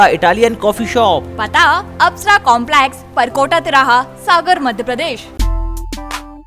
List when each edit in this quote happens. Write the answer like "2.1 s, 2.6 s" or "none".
5.3 s